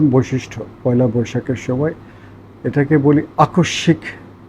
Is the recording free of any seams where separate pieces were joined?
yes; 0 cuts

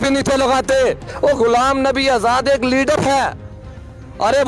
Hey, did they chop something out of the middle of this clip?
yes; 1 cut; at 1.1 s

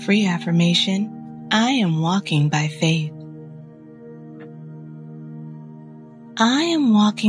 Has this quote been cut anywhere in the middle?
yes; 2 cuts; at 3.1 s, 6.3 s

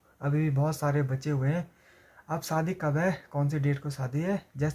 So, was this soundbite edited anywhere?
no; 0 cuts

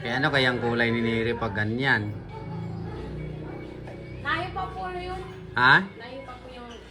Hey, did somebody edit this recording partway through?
no; 0 cuts

